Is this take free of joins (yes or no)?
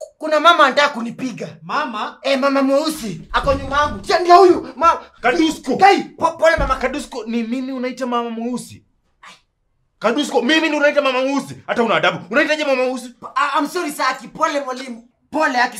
yes